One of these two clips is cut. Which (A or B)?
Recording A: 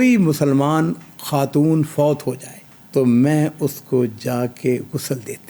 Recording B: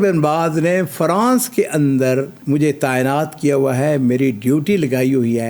B